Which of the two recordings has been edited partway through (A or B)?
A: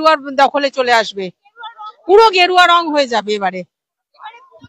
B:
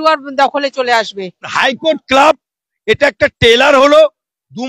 B